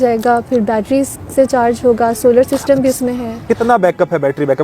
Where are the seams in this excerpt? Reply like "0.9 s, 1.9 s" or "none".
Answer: 3.4 s

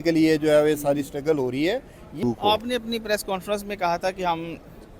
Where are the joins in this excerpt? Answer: 2.2 s

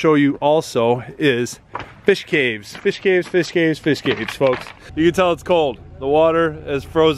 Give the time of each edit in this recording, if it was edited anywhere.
4.8 s

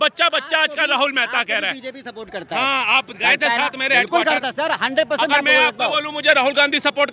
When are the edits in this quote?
none

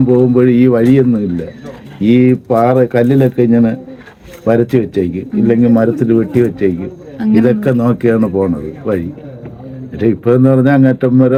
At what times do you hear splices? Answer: none

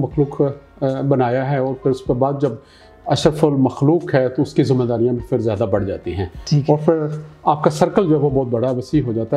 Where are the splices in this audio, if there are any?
none

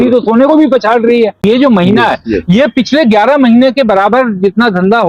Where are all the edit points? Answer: 1.4 s

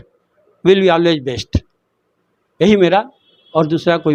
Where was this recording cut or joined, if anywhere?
none

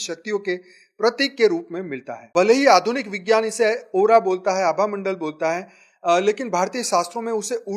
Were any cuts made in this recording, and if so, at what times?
2.3 s

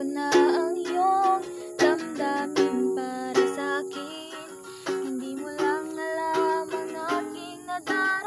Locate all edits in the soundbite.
none

